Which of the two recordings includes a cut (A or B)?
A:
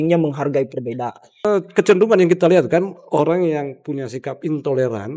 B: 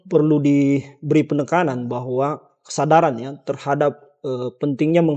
A